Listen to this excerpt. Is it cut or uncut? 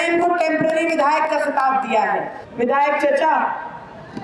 cut